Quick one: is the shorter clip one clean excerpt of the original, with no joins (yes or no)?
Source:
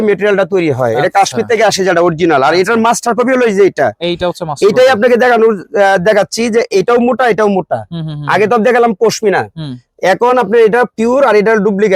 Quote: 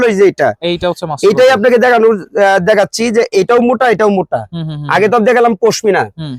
yes